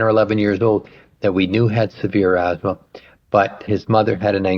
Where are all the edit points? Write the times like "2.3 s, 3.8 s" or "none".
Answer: 3.6 s